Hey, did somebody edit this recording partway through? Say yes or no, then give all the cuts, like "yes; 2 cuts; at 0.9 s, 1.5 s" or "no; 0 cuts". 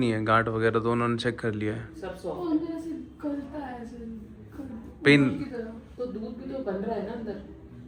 no; 0 cuts